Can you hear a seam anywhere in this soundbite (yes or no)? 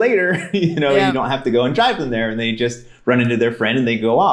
no